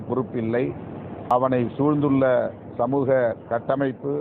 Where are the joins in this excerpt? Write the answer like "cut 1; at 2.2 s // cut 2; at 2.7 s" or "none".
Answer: cut 1; at 1.3 s